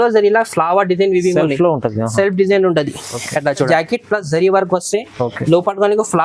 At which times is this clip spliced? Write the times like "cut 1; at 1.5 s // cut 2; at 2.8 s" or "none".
cut 1; at 3.7 s